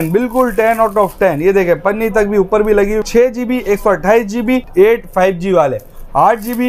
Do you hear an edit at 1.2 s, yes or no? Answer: no